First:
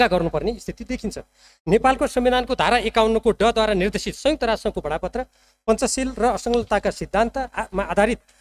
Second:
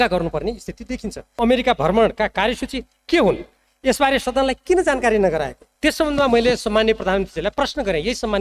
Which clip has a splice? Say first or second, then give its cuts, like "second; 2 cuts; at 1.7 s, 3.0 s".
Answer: second; 2 cuts; at 1.2 s, 5.6 s